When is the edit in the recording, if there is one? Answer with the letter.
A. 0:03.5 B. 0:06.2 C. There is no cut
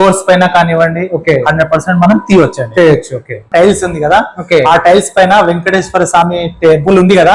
A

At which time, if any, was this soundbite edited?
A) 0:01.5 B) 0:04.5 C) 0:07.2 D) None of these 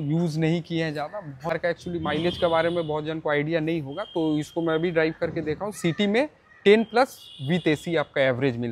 A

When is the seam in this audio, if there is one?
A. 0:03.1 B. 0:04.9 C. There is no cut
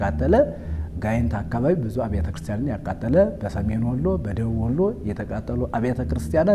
C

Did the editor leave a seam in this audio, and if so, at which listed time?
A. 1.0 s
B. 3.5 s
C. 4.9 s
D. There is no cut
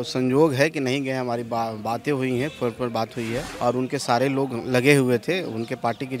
B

